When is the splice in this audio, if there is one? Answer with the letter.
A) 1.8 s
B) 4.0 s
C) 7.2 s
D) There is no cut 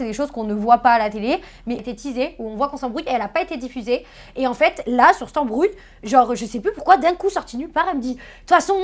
A